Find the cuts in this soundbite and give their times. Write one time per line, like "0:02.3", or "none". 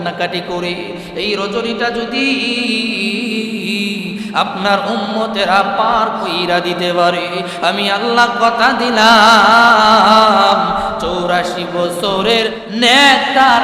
0:12.6

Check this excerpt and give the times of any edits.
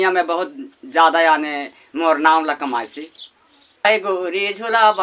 0:03.8

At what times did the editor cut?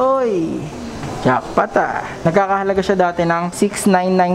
0:02.1
0:03.5

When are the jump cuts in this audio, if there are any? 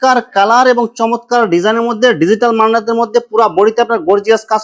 none

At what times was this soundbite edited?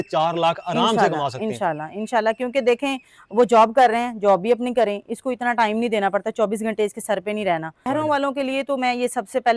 0:07.9

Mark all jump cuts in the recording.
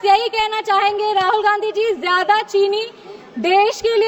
none

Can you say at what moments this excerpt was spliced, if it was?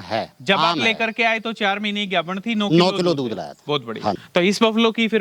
0:04.2

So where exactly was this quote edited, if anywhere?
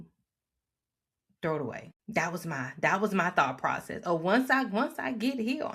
0:01.9

